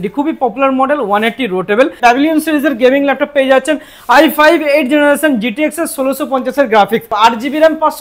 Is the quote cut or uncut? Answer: cut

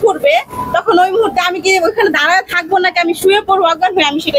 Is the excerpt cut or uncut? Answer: uncut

